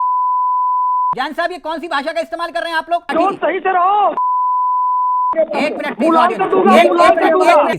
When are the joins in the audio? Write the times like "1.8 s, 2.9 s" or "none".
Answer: 1.1 s, 3.1 s